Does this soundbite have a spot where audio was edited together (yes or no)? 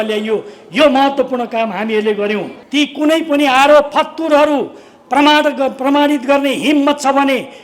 yes